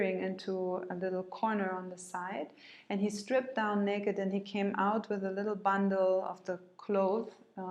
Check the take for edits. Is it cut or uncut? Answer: uncut